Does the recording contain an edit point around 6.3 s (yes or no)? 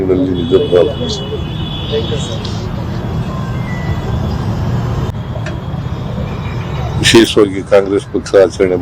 no